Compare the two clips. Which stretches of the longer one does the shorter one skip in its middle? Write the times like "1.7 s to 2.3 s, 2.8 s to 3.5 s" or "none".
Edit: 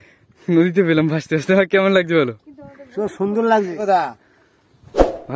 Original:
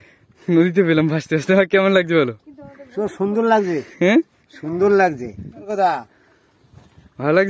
3.7 s to 5.6 s

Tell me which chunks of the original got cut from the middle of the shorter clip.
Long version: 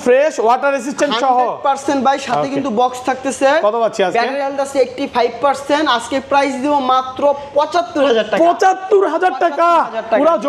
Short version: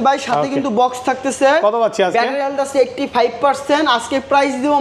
none

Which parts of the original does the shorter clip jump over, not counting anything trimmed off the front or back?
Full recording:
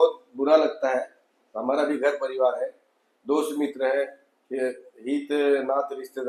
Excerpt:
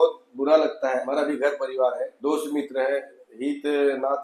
1.1 s to 1.7 s, 2.7 s to 3.2 s, 4.3 s to 4.9 s

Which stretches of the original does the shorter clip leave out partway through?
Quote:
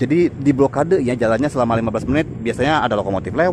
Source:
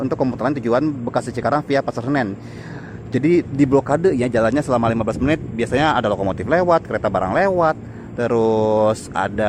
none

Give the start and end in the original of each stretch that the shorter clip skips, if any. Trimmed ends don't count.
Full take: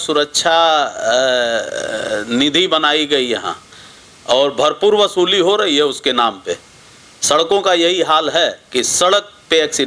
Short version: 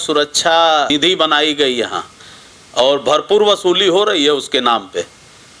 0.9 s to 2.4 s

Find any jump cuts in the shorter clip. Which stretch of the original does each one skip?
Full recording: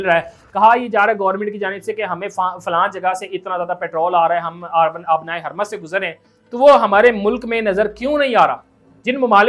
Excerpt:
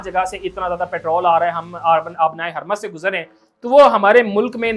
none

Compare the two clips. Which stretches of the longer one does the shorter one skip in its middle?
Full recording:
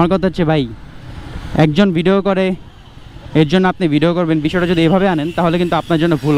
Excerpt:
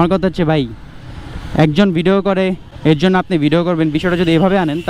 2.7 s to 3.2 s

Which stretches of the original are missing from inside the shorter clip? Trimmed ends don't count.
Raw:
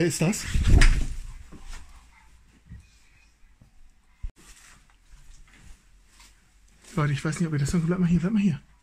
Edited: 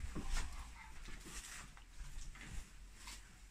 2.5 s to 4.3 s

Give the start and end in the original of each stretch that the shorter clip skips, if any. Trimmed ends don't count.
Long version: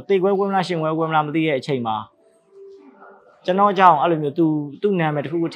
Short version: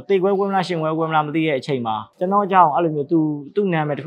2.1 s to 3.3 s

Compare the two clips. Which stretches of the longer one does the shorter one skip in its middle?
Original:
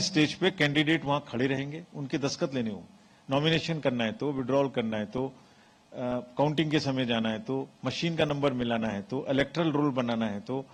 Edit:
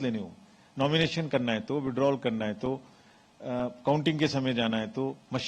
none

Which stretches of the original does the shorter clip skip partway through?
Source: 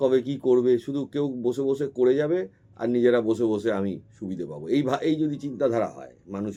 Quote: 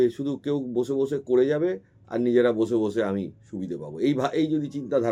none

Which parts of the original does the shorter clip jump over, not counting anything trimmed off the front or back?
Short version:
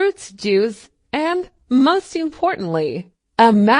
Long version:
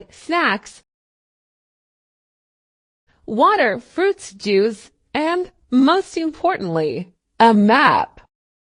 none

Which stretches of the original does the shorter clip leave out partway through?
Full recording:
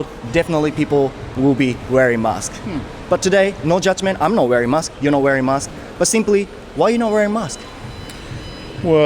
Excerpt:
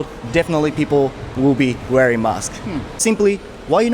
3.0 s to 6.1 s

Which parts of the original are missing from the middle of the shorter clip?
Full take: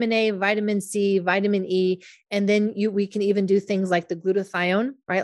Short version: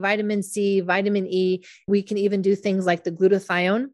2.3 s to 2.9 s

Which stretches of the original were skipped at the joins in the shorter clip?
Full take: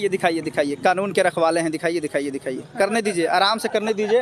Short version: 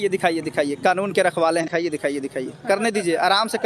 1.7 s to 1.8 s

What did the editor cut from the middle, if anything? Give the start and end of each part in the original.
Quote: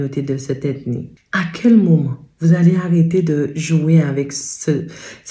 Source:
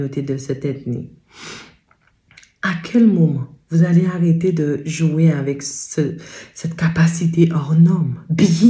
1.1 s to 2.5 s

